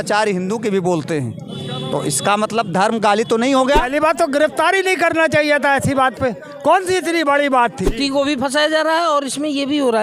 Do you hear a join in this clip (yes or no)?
yes